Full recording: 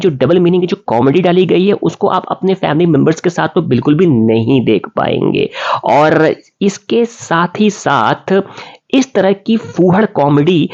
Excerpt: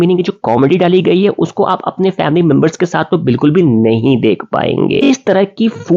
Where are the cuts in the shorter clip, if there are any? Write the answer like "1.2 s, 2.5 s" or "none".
5.0 s